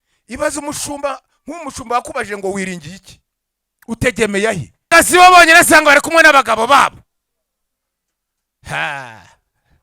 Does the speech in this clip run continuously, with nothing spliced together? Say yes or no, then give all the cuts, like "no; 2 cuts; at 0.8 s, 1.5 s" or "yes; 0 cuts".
no; 1 cut; at 4.9 s